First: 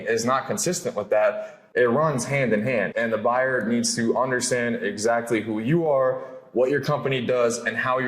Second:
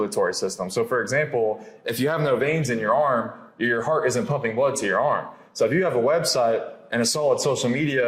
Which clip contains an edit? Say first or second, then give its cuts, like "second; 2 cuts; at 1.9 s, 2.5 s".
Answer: first; 2 cuts; at 1.6 s, 2.9 s